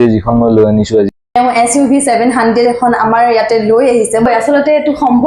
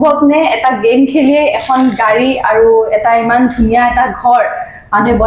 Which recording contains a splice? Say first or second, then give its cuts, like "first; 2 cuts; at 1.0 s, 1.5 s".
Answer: first; 2 cuts; at 1.2 s, 4.3 s